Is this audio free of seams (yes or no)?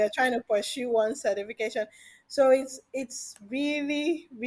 yes